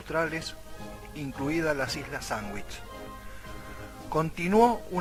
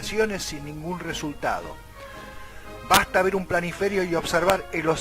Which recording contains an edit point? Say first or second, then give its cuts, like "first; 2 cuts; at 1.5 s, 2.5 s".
second; 1 cut; at 2.3 s